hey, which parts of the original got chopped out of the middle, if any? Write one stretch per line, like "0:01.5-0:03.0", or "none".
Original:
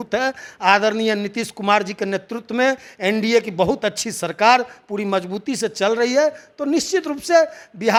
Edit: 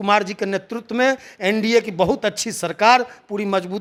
none